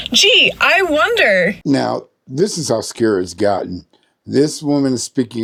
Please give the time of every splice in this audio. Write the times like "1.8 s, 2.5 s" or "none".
none